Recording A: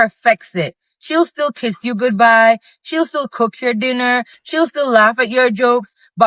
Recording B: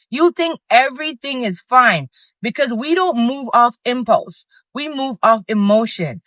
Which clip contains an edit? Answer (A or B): A